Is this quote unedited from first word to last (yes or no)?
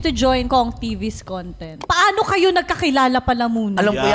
yes